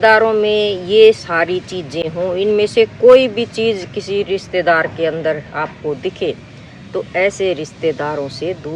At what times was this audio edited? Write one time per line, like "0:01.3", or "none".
none